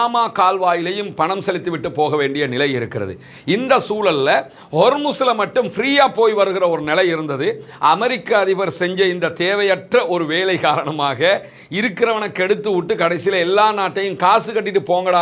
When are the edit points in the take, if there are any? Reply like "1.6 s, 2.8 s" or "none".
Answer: none